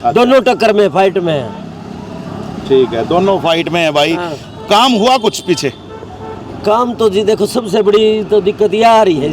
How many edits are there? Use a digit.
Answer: 0